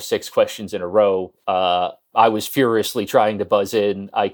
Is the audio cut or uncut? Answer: cut